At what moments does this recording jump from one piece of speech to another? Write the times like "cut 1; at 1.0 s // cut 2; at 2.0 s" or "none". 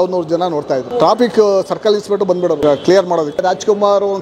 cut 1; at 1.0 s // cut 2; at 2.6 s // cut 3; at 3.4 s